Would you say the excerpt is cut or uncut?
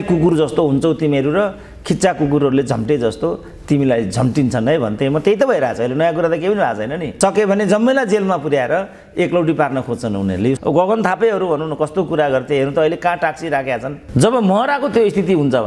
cut